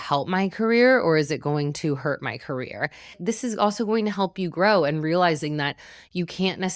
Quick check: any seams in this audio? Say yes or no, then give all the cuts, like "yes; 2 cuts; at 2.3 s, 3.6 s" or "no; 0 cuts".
yes; 1 cut; at 3.2 s